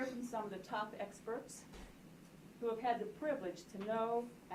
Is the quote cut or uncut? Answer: uncut